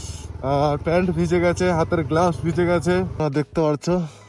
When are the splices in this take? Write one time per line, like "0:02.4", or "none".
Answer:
0:03.2